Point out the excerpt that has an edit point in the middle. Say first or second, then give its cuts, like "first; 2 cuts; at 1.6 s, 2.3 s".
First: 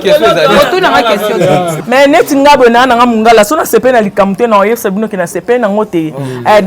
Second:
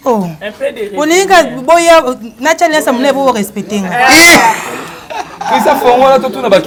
first; 1 cut; at 1.8 s